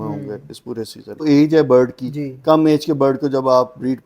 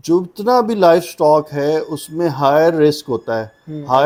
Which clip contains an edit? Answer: first; 1 cut; at 1.2 s

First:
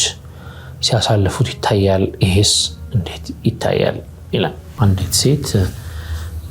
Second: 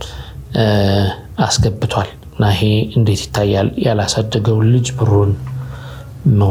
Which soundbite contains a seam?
first; 1 cut; at 4.8 s

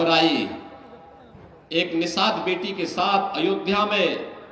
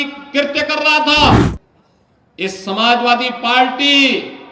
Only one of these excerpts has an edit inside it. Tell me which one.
second; 1 cut; at 1.4 s

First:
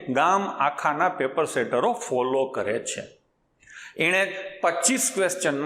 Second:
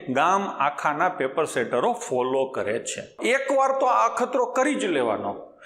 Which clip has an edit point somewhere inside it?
second; 1 cut; at 3.2 s

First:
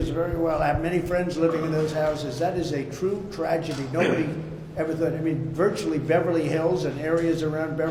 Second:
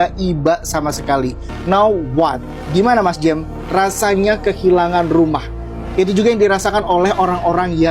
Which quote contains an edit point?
second; 1 cut; at 1.5 s

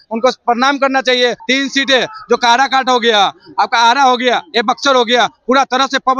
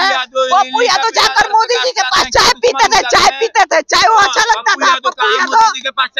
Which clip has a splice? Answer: first; 1 cut; at 1.4 s

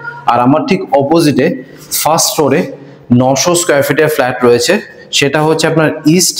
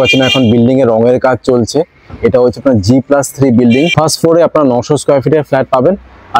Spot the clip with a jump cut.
second; 1 cut; at 3.9 s

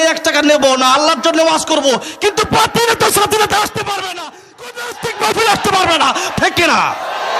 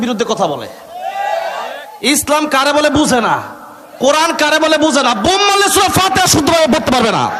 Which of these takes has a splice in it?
first; 1 cut; at 6.3 s

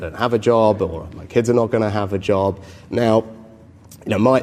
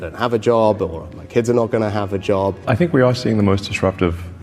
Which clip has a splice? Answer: second; 1 cut; at 2.6 s

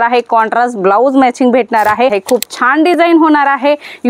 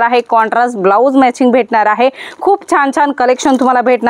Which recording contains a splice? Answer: first; 1 cut; at 2.2 s

